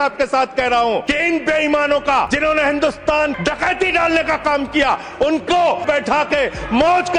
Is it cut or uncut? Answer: cut